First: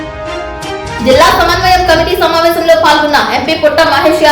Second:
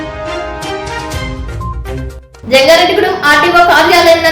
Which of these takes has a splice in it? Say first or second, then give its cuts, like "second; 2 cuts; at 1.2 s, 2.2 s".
first; 1 cut; at 1.0 s